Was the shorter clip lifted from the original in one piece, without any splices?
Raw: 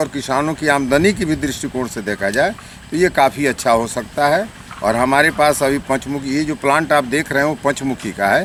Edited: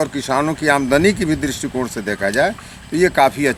yes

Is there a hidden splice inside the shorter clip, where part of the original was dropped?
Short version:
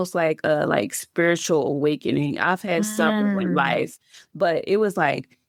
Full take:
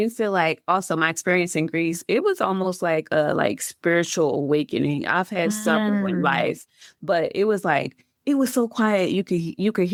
no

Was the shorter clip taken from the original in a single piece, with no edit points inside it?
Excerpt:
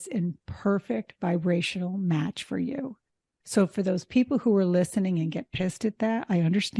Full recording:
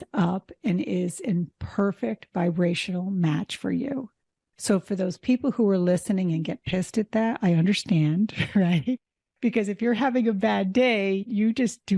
yes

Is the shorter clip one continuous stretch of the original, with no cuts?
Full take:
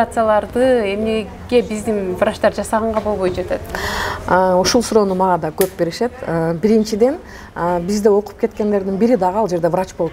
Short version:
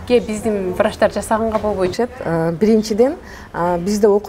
no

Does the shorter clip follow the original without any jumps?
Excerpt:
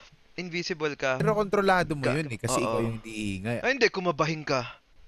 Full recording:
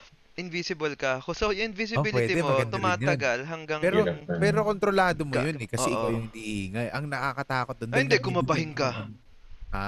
no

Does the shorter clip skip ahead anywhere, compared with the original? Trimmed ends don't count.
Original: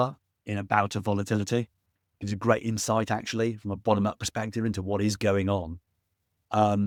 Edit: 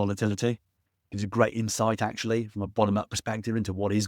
no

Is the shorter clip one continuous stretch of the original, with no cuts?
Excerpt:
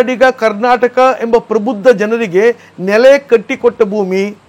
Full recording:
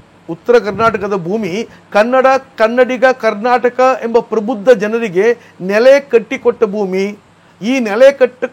yes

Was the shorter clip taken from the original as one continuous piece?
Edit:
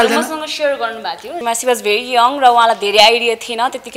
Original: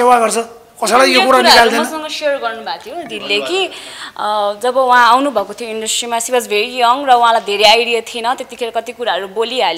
no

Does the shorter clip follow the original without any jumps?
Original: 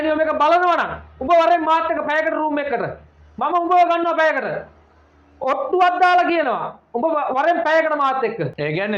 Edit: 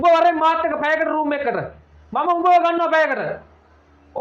yes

